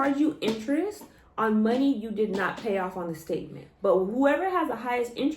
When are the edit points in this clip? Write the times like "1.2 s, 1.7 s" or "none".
3.6 s